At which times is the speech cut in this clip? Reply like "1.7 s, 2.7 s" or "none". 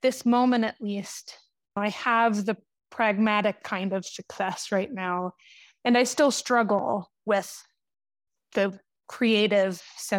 1.8 s, 8.2 s